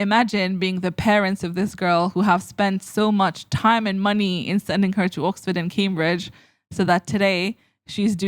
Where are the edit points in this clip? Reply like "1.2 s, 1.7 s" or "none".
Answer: none

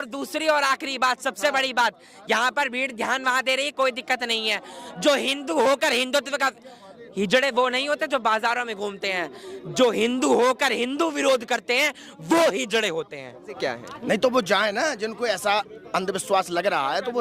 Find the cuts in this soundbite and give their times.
13.6 s

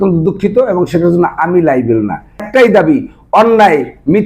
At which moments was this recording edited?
2.5 s

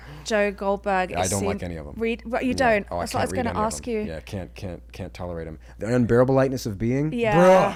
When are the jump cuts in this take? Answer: none

